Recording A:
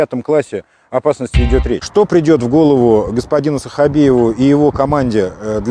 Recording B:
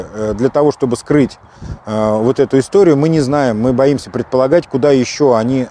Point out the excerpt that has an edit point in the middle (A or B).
A